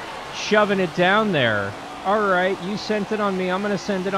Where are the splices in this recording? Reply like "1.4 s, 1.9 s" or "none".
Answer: 2.0 s